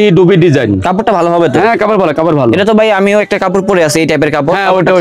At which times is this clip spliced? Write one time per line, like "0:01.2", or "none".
none